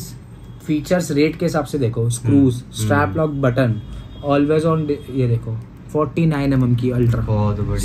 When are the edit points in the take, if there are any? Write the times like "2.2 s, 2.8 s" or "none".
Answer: none